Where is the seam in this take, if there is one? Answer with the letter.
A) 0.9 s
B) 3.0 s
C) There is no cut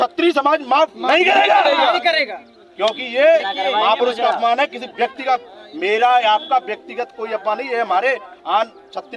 C